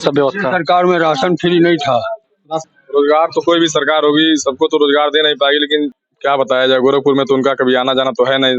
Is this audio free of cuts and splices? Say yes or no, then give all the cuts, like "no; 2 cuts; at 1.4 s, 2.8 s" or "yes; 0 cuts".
no; 2 cuts; at 2.6 s, 6.0 s